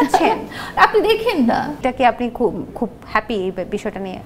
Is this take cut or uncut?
cut